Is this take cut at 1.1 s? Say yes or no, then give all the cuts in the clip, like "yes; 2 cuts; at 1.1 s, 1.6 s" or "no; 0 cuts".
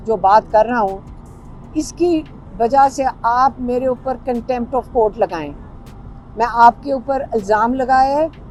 no; 0 cuts